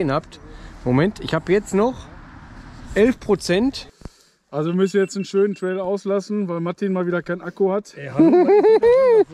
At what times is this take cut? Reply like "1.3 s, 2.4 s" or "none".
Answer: 3.9 s